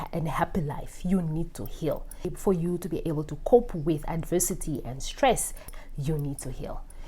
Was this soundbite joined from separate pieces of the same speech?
yes; 1 cut; at 5.7 s

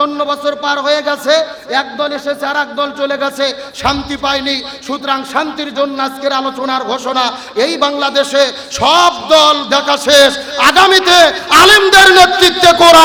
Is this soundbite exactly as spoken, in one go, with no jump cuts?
yes; 0 cuts

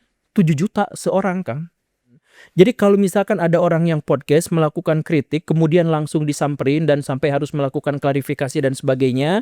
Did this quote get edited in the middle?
yes; 1 cut; at 2.3 s

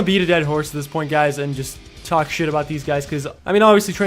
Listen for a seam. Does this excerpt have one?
yes; 1 cut; at 1.1 s

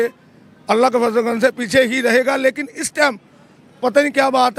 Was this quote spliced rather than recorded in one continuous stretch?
no; 0 cuts

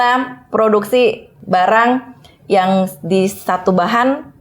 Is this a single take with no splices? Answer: no; 1 cut; at 1.3 s

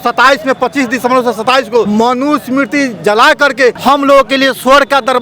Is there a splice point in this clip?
yes; 2 cuts; at 1.9 s, 3.8 s

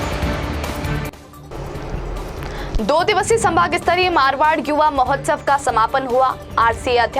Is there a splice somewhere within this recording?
yes; 1 cut; at 1.3 s

